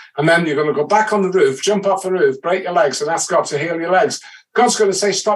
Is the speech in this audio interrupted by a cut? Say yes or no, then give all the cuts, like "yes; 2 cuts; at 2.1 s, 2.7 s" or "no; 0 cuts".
no; 0 cuts